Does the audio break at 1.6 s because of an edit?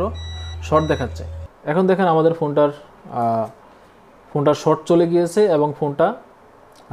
yes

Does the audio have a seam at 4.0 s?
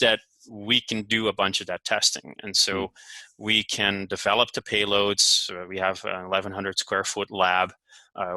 no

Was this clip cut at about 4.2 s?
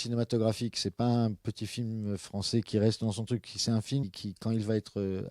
yes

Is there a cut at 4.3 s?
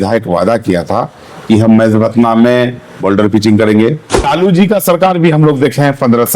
yes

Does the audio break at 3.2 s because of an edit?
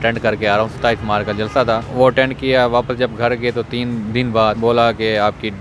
no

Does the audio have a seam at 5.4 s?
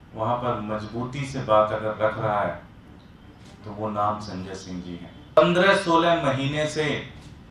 yes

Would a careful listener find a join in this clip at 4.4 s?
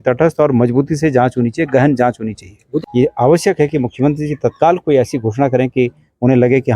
no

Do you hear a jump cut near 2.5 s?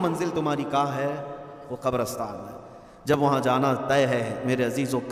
no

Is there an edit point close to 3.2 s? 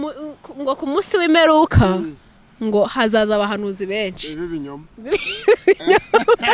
no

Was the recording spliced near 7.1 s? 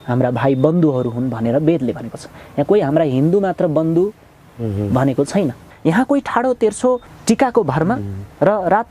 yes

